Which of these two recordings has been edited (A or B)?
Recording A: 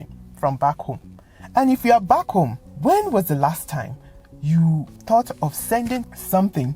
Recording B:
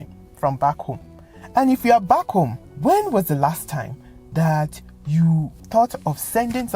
A